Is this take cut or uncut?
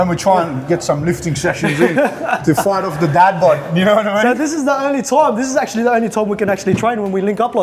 uncut